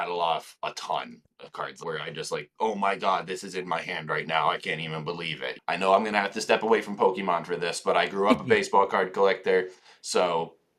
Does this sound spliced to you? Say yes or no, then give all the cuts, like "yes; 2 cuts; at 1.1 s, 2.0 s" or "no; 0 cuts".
yes; 2 cuts; at 1.8 s, 5.5 s